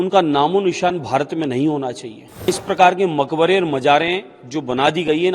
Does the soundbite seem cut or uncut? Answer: cut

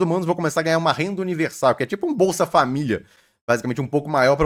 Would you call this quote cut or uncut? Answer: uncut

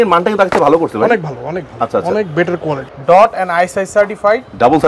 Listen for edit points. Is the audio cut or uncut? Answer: cut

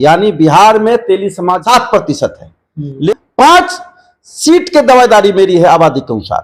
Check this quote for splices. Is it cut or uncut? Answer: cut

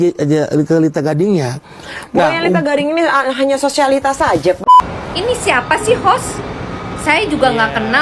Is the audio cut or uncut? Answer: cut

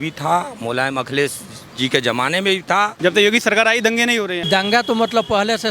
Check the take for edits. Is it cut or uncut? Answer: cut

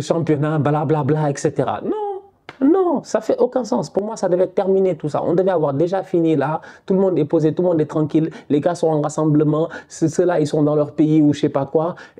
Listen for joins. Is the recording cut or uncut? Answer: uncut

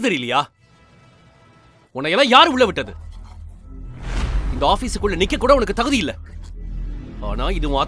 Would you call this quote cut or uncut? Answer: uncut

